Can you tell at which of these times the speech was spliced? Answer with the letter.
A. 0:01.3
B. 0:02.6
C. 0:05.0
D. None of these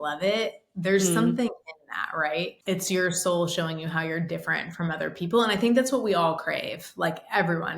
B